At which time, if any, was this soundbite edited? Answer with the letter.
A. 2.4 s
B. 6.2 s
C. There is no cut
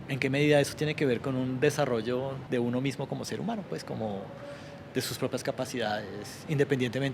A